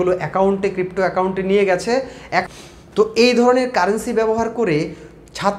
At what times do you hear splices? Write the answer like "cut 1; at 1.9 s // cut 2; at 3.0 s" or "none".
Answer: cut 1; at 2.4 s